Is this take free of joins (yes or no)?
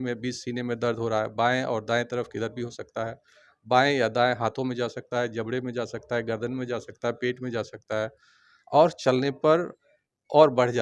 yes